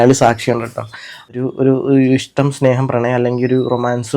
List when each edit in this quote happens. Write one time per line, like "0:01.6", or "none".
0:01.3